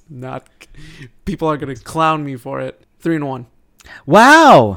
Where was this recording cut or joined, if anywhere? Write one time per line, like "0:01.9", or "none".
0:02.8

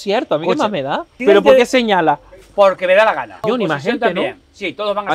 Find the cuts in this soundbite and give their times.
0:01.1
0:03.4

